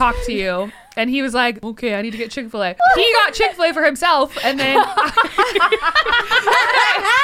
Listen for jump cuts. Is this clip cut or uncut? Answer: cut